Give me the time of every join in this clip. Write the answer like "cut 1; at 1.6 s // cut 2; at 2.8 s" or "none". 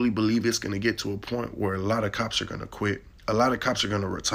cut 1; at 3.1 s